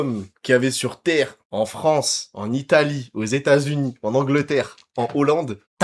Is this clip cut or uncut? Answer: uncut